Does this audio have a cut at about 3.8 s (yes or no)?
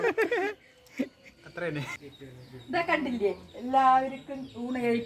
no